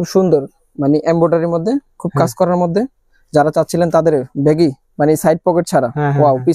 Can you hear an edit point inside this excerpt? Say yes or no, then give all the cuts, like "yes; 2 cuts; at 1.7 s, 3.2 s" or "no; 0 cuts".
no; 0 cuts